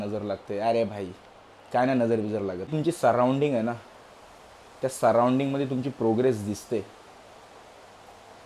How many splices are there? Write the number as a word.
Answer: one